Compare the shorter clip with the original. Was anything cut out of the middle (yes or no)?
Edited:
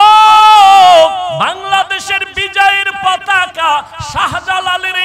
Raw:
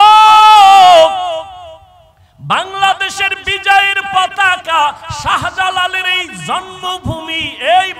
yes